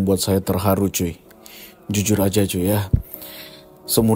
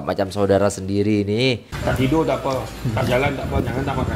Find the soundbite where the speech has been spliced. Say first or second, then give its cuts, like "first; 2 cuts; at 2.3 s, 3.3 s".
second; 1 cut; at 1.7 s